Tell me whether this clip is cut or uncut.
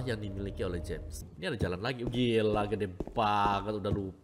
cut